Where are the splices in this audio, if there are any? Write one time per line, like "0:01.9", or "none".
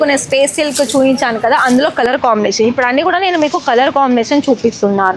none